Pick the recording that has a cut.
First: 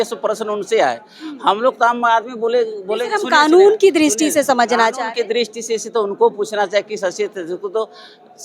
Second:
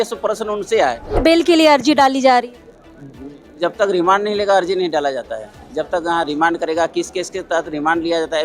second; 1 cut; at 1.2 s

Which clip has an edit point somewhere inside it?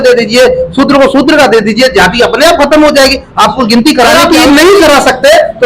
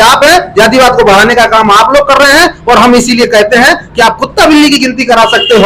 first; 1 cut; at 4.1 s

